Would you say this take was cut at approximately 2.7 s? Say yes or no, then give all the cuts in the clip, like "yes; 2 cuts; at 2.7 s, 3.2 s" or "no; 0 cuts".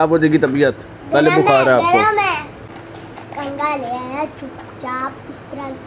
yes; 1 cut; at 2.7 s